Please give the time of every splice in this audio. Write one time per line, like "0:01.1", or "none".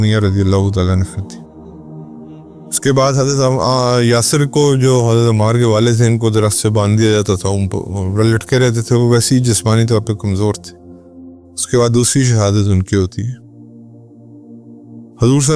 0:01.6
0:02.8